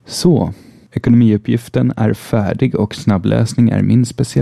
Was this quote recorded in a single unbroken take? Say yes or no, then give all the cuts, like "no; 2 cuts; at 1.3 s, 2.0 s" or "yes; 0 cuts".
yes; 0 cuts